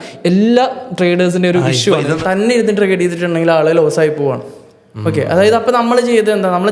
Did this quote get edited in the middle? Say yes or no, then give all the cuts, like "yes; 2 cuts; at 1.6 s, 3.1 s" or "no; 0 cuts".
yes; 1 cut; at 2.2 s